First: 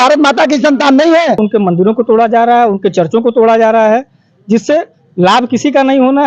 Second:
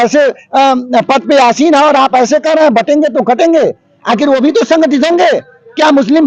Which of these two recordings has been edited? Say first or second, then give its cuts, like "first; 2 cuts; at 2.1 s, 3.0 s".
first; 1 cut; at 1.4 s